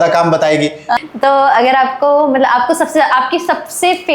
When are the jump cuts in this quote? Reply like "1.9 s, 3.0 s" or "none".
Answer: 1.0 s